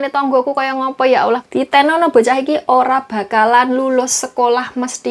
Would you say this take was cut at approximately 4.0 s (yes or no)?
no